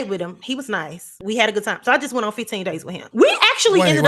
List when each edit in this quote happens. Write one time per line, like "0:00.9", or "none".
0:01.1
0:02.9

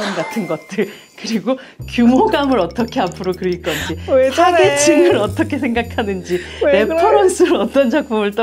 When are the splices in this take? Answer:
none

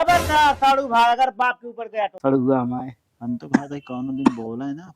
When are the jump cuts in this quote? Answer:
0:02.2

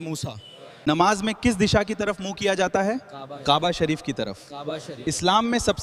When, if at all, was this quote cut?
none

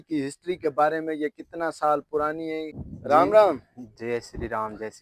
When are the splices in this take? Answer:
none

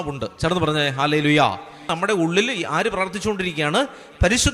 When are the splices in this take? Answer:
0:01.8

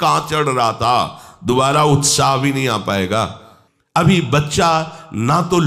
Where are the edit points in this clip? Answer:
0:04.0

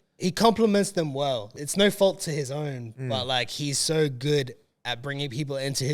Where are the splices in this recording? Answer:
0:01.5

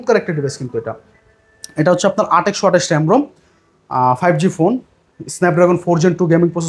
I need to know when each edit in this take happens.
none

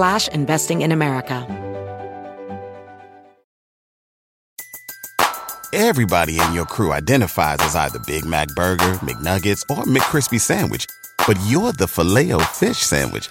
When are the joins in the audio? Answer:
0:01.4

